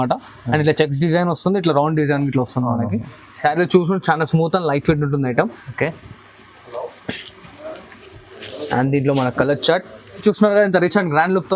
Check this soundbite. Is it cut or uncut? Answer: cut